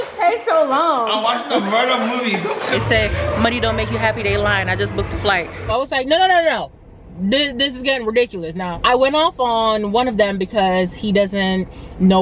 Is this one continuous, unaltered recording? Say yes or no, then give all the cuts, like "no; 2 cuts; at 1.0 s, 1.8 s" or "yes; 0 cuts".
no; 3 cuts; at 2.8 s, 5.7 s, 8.7 s